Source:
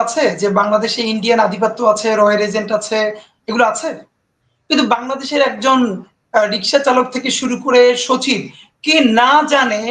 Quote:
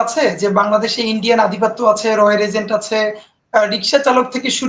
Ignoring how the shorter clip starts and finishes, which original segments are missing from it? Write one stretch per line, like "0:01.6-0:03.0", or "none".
0:03.3-0:06.1